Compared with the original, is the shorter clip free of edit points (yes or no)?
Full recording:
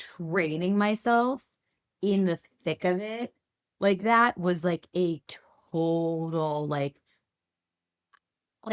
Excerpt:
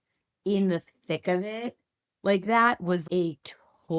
no